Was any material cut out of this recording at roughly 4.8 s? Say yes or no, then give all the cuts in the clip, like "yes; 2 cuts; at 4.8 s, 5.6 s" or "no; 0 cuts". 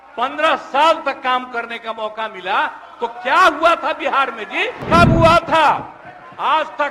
yes; 1 cut; at 4.8 s